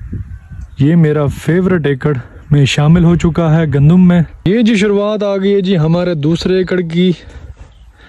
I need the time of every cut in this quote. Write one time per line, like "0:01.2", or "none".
0:04.4